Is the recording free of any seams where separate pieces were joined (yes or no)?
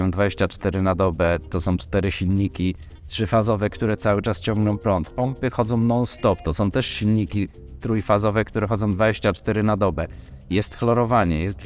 yes